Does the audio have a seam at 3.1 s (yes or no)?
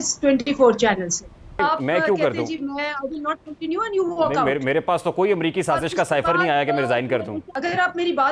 no